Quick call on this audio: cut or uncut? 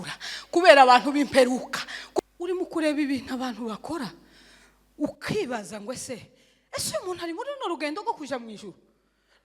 cut